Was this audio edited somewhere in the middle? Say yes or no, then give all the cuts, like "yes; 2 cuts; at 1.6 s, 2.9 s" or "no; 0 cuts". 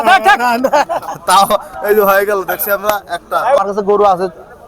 yes; 1 cut; at 3.6 s